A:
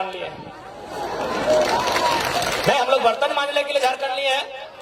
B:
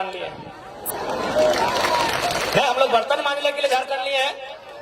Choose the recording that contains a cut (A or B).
B